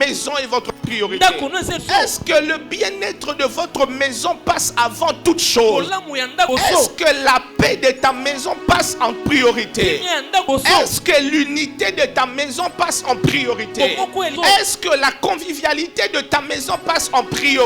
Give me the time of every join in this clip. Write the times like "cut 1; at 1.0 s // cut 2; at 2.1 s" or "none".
cut 1; at 1.8 s // cut 2; at 6.5 s // cut 3; at 10.5 s // cut 4; at 14.3 s